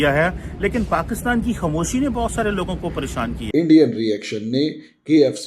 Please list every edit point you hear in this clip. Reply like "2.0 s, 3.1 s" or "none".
3.3 s

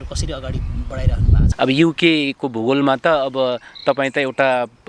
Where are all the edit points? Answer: 1.5 s

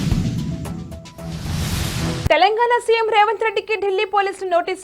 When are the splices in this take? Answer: none

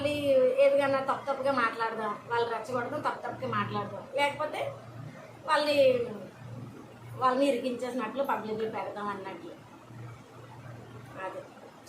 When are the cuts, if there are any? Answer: none

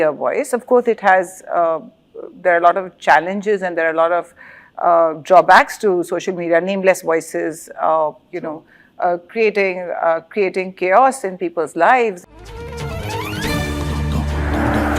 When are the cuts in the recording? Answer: 12.2 s

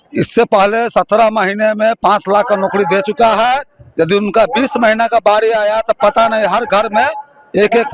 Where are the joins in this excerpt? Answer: none

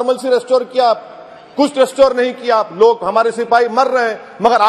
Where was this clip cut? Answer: none

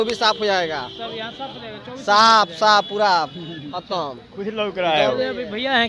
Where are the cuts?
none

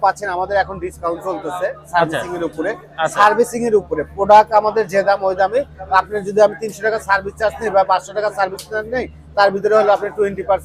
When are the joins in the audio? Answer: none

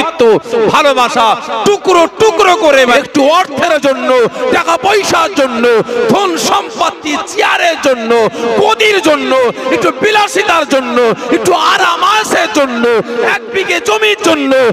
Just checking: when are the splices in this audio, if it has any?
2.9 s

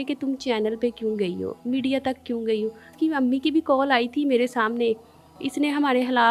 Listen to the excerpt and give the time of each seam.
2.9 s

